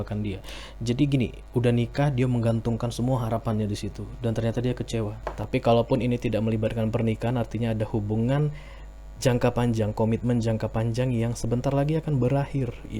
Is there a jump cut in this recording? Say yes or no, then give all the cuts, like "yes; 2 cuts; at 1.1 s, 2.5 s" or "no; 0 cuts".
yes; 1 cut; at 5.3 s